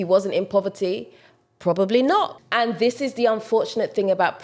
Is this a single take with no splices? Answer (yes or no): no